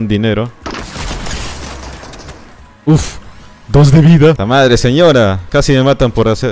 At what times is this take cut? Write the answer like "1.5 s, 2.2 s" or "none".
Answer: 2.5 s, 4.4 s, 5.4 s